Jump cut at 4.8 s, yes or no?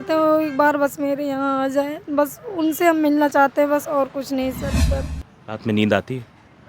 yes